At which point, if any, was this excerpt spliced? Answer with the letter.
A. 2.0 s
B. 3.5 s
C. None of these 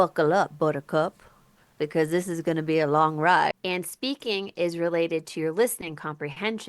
B